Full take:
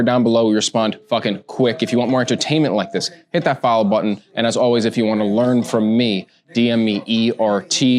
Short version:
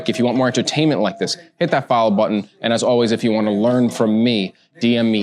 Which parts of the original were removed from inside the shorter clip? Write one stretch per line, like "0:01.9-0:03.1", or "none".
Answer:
none